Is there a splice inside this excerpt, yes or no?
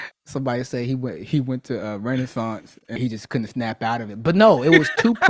yes